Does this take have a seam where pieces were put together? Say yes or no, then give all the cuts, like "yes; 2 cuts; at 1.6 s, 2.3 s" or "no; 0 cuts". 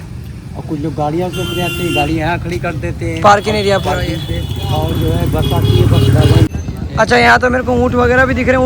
yes; 1 cut; at 6.5 s